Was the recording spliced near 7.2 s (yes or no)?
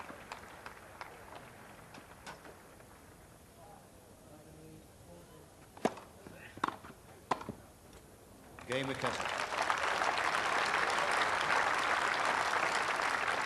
no